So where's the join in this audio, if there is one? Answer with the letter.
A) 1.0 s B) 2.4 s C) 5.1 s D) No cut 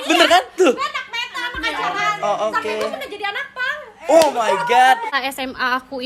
C